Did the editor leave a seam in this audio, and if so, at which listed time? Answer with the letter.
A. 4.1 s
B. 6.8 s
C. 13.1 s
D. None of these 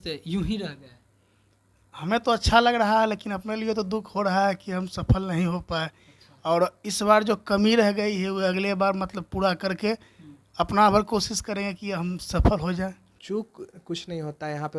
C